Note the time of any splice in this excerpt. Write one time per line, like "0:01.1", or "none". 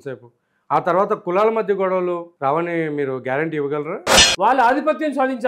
0:02.3
0:04.2